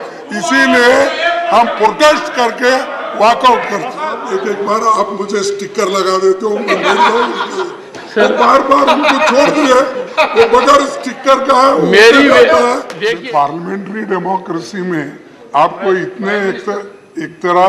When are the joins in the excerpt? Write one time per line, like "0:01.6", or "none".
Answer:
0:04.2
0:12.9